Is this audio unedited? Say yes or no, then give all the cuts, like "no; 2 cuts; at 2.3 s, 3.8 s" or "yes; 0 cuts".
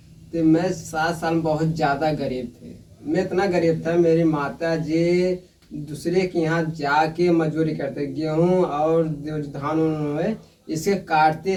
yes; 0 cuts